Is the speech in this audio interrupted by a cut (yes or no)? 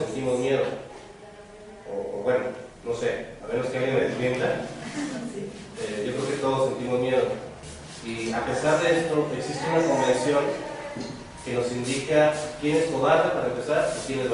no